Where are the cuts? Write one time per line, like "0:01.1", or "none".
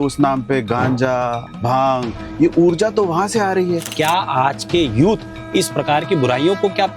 0:01.5
0:03.9